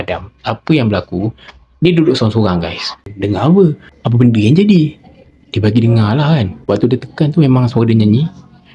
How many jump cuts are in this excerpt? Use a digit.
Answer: 1